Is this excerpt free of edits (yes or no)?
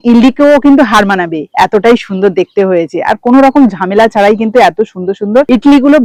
yes